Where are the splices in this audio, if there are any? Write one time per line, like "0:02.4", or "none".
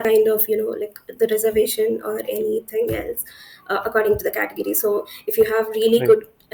none